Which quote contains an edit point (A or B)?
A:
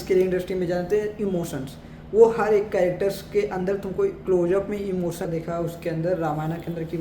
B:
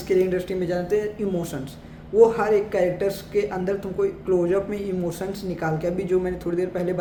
A